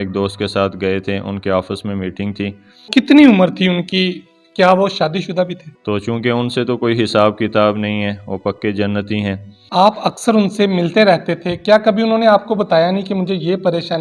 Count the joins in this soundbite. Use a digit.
3